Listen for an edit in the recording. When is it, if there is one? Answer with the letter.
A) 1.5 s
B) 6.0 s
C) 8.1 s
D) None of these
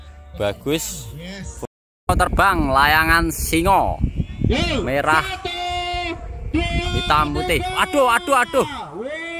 A